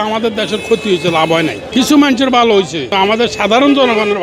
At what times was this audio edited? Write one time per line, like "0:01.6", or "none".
0:01.6
0:02.9